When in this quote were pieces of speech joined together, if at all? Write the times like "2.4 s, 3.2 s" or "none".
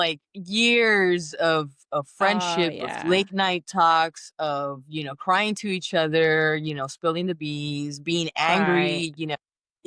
none